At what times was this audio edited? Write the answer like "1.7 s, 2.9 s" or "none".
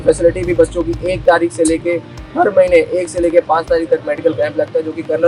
none